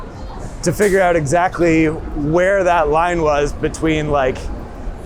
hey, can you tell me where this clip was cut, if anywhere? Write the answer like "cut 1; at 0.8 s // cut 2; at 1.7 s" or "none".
none